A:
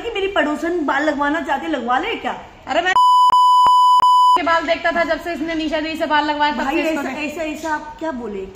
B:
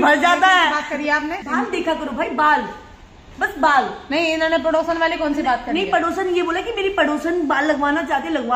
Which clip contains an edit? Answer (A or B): B